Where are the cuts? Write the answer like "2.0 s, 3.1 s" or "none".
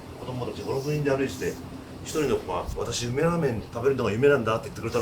2.7 s, 3.7 s

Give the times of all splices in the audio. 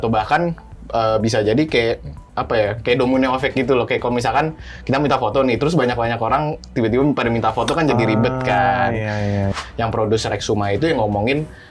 9.5 s

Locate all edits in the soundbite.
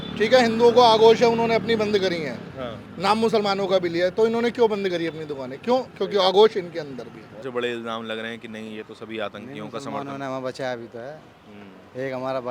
7.4 s

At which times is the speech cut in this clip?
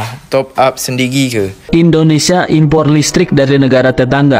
1.6 s

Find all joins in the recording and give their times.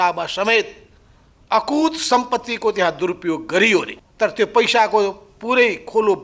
4.0 s

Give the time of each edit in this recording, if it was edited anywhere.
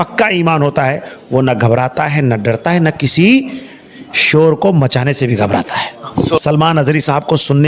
6.4 s

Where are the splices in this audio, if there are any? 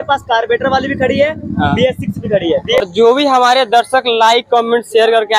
2.8 s

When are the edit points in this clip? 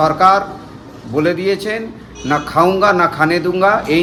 none

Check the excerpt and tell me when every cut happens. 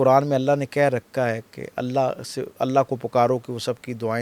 none

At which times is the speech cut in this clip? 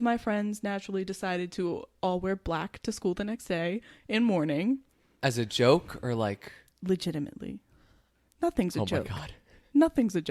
none

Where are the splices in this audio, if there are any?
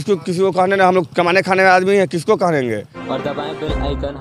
2.9 s

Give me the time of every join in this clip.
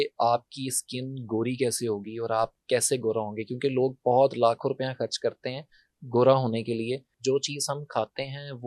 7.1 s

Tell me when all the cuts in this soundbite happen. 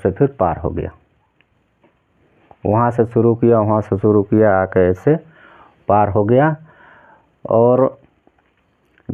none

